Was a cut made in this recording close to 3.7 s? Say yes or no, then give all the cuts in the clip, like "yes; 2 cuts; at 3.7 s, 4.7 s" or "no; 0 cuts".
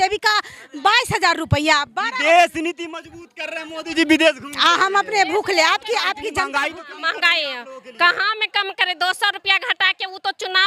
no; 1 cut; at 6.5 s